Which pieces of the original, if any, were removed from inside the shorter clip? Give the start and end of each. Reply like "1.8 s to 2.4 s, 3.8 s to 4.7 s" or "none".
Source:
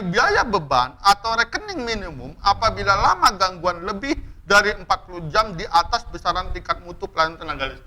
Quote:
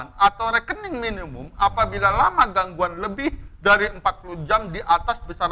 none